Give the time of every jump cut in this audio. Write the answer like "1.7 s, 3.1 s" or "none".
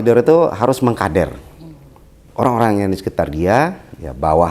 2.2 s